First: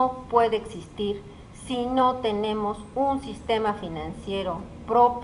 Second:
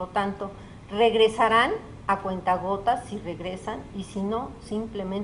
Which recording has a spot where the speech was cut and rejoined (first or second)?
second